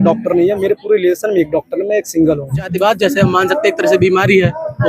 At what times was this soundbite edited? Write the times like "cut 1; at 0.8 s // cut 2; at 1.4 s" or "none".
cut 1; at 2.7 s